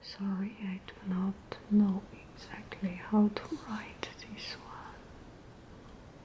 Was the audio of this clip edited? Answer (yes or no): no